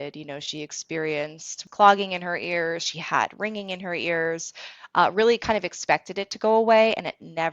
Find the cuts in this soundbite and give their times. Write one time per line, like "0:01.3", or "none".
0:01.6